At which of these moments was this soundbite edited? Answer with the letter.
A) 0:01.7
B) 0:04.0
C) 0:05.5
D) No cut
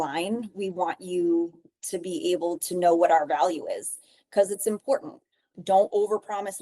C